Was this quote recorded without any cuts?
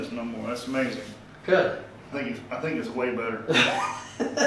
no; 1 cut; at 2.0 s

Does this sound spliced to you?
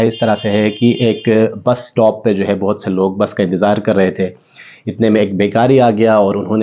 no; 0 cuts

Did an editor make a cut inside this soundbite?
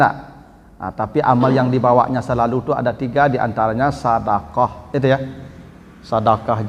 no; 0 cuts

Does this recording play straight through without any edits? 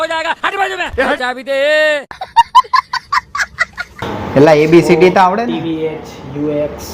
no; 3 cuts; at 1.3 s, 2.2 s, 4.0 s

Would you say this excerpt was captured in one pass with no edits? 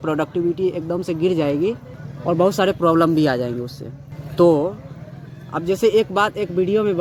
yes; 0 cuts

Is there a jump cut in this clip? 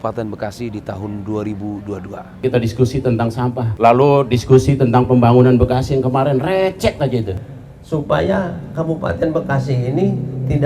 yes; 2 cuts; at 2.4 s, 7.4 s

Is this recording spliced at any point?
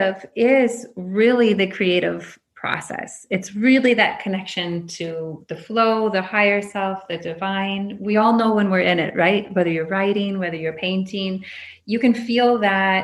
no; 0 cuts

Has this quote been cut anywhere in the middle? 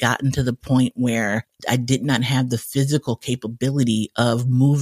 yes; 1 cut; at 1.6 s

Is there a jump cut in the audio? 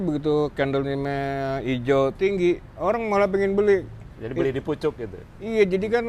no; 0 cuts

